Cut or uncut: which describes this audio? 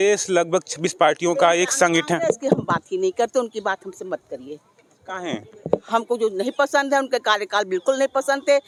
uncut